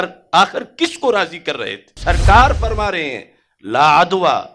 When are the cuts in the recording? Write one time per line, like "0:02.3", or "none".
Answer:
0:01.9